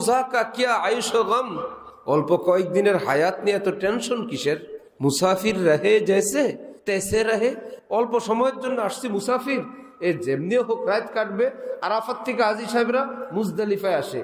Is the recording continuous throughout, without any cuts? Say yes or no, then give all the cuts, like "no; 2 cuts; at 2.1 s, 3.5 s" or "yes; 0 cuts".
no; 2 cuts; at 6.7 s, 7.7 s